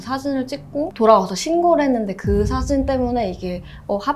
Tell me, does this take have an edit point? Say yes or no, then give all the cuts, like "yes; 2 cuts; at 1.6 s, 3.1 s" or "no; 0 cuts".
no; 0 cuts